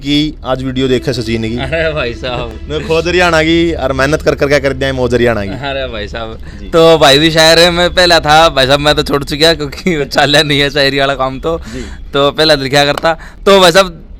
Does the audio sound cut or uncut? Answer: uncut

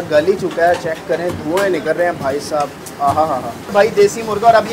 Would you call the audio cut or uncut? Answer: cut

